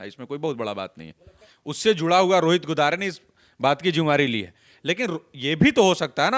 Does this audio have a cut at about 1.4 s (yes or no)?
yes